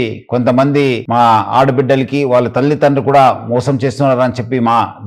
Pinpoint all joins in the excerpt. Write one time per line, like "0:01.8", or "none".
none